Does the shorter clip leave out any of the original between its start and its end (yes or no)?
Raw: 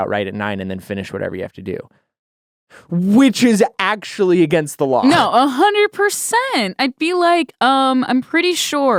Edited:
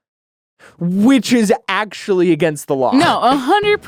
no